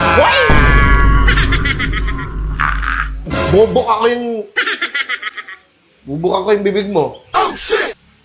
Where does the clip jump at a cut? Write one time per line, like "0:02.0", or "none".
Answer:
none